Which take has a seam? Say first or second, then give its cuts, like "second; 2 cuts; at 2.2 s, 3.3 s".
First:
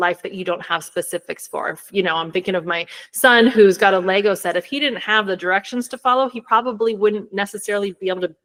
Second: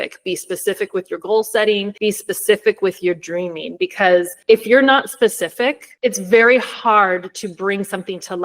second; 3 cuts; at 1.9 s, 4.3 s, 5.9 s